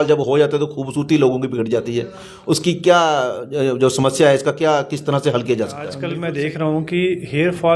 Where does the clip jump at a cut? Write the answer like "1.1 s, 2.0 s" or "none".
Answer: 6.0 s